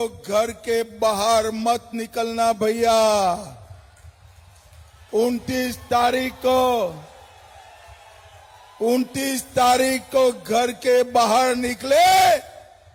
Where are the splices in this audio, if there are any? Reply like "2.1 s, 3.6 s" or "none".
none